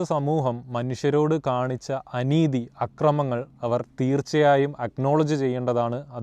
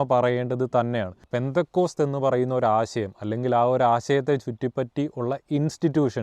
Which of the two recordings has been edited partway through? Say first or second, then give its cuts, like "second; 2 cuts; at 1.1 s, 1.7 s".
second; 1 cut; at 1.2 s